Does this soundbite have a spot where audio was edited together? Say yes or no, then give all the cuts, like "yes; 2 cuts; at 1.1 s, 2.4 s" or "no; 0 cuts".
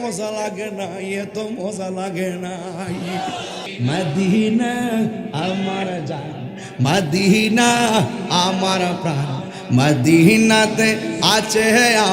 yes; 1 cut; at 3.7 s